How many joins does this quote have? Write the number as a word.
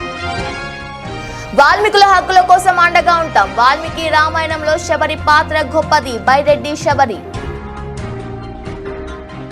one